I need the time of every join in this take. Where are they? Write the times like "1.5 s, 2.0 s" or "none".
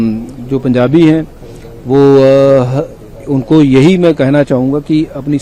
none

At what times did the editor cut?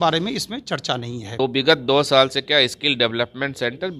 1.3 s

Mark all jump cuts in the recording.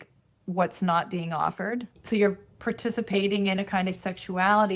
1.9 s, 4.0 s

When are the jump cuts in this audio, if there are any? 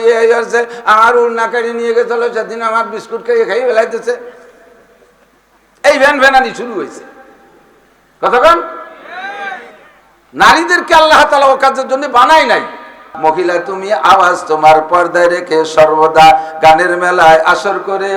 13.1 s

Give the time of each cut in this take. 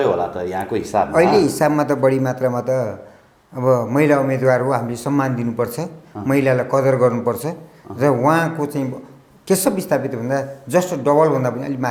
none

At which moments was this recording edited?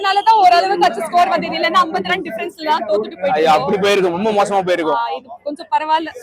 none

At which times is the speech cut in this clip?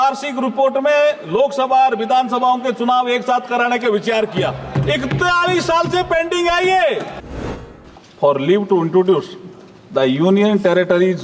7.4 s

